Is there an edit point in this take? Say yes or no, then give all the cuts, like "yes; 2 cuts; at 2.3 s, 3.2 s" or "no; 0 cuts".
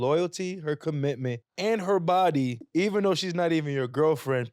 yes; 2 cuts; at 1.5 s, 2.6 s